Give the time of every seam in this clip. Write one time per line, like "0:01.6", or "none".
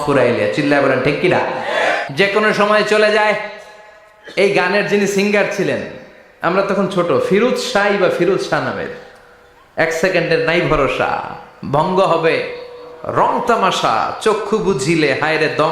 0:02.0